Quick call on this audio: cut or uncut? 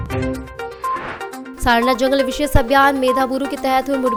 uncut